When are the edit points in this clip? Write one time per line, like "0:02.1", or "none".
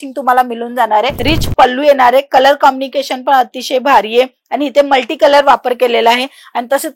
0:01.2